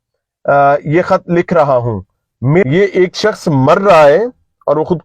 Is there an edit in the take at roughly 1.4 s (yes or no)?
no